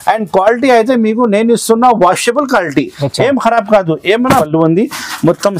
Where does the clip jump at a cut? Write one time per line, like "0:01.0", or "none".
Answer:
0:04.4